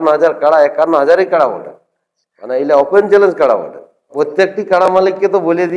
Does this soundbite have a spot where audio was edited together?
yes; 1 cut; at 4.1 s

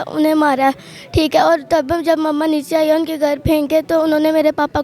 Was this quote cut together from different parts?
no; 0 cuts

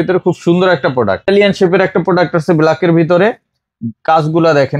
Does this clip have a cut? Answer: yes; 1 cut; at 1.3 s

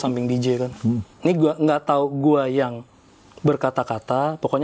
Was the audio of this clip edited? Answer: yes; 1 cut; at 1.1 s

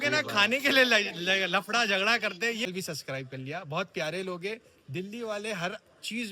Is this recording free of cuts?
no; 1 cut; at 2.7 s

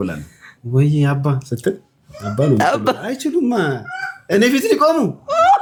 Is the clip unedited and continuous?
yes; 0 cuts

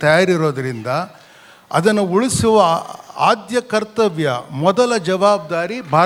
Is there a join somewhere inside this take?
no; 0 cuts

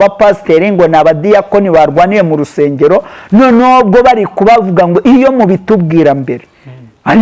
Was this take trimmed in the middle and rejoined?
no; 0 cuts

